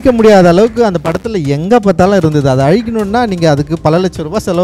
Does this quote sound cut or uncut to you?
uncut